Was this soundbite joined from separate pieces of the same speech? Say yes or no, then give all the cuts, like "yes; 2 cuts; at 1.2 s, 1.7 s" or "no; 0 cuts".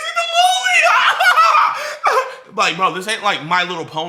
no; 0 cuts